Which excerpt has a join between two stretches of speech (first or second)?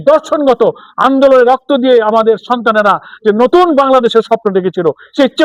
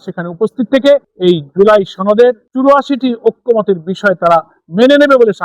second